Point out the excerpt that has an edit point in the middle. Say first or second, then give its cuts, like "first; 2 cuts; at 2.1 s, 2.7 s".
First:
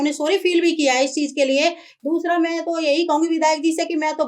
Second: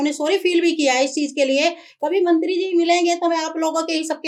first; 1 cut; at 1.9 s